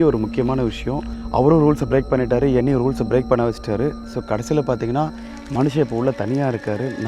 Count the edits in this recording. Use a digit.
1